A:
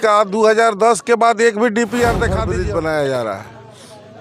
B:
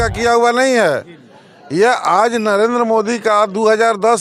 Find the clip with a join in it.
A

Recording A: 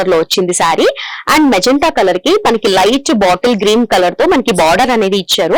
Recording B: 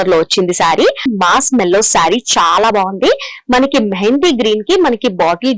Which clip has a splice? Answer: B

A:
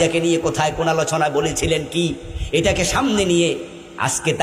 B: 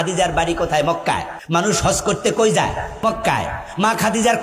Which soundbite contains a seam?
B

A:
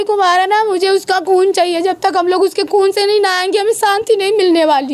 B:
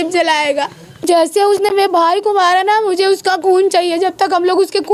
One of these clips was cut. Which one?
B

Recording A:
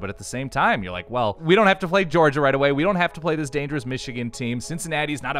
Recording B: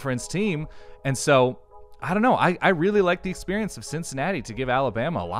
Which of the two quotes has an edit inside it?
A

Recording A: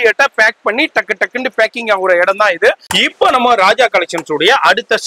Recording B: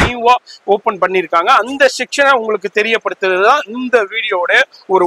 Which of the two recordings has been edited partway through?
A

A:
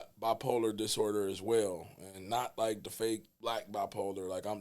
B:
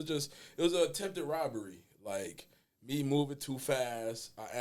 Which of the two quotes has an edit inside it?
A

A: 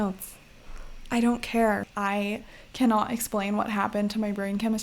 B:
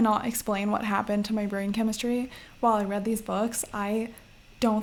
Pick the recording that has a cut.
A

